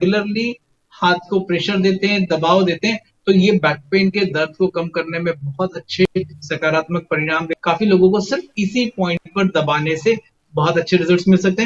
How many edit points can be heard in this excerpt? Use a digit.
0